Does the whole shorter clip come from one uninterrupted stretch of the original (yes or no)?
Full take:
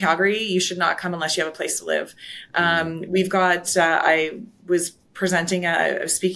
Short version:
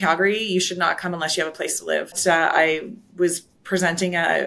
no